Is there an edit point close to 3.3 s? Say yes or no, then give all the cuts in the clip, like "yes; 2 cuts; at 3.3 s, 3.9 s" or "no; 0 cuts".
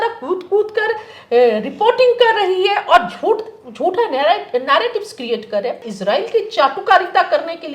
no; 1 cut; at 5.8 s